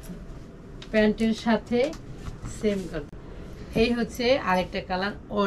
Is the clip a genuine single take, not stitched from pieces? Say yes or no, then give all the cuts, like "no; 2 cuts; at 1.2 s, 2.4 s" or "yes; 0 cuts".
no; 1 cut; at 3.1 s